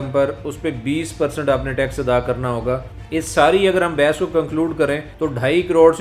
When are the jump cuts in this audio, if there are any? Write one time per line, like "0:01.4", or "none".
0:02.9
0:05.1